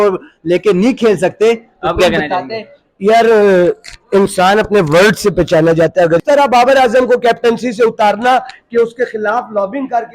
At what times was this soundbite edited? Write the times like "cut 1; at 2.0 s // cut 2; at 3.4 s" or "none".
cut 1; at 6.2 s